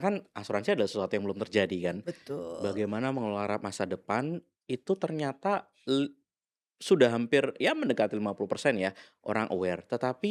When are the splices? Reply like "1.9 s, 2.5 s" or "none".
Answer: none